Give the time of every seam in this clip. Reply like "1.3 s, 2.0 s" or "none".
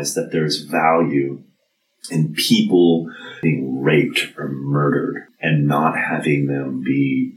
3.4 s, 5.2 s